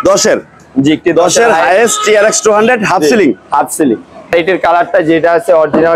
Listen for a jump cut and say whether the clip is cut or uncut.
cut